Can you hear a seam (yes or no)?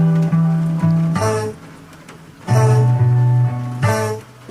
yes